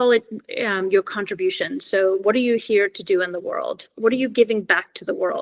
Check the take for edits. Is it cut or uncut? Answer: uncut